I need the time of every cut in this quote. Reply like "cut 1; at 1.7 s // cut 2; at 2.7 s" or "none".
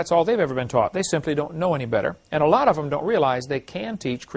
cut 1; at 1.1 s